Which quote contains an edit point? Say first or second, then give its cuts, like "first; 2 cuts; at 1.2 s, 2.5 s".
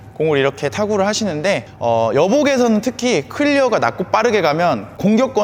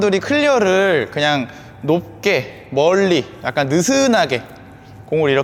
first; 1 cut; at 1.7 s